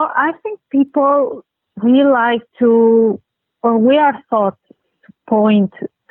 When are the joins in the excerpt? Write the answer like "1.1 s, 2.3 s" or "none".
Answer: none

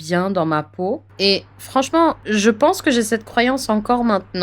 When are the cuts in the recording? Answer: 1.1 s, 2.2 s

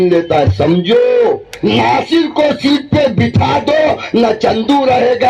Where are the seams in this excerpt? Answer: 1.5 s

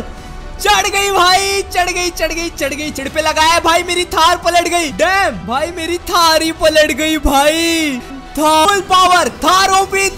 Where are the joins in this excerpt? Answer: 3.0 s, 8.7 s

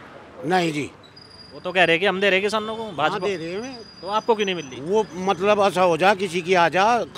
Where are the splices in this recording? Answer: none

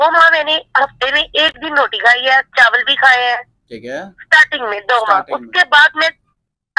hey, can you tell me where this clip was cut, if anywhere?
none

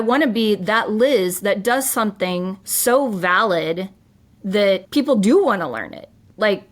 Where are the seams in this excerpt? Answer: 2.6 s, 4.9 s

